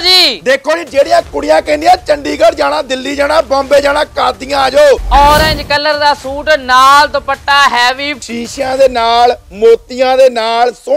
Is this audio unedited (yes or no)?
no